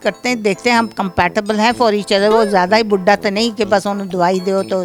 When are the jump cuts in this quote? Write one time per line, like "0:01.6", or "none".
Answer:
none